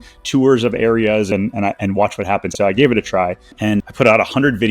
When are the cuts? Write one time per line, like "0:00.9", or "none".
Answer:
0:01.3
0:02.5
0:03.5